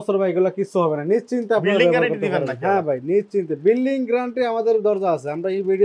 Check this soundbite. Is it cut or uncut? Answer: uncut